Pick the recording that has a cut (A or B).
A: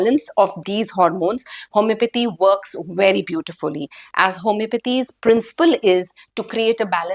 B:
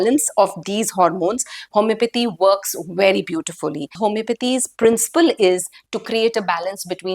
B